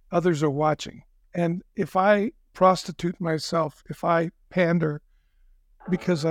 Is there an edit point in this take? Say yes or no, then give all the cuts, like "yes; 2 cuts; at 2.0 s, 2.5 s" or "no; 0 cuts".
yes; 2 cuts; at 1.2 s, 2.4 s